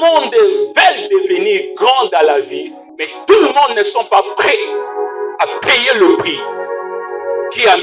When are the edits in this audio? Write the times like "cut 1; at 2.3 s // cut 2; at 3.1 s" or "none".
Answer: none